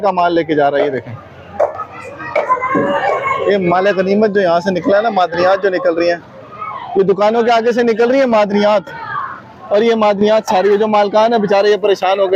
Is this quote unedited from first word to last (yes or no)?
yes